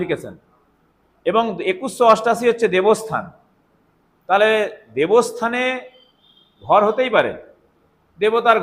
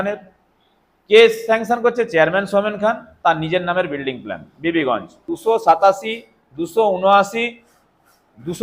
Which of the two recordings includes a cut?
second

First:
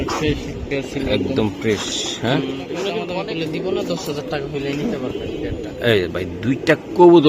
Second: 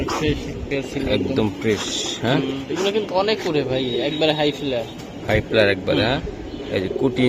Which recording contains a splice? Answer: first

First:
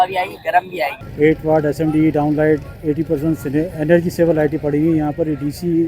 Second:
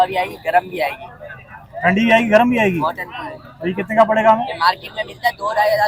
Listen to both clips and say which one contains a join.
first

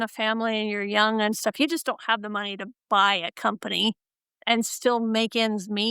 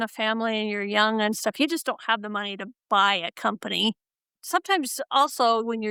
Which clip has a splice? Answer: first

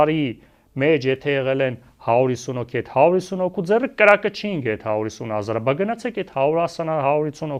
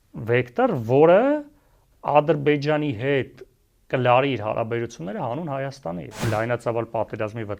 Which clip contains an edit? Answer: second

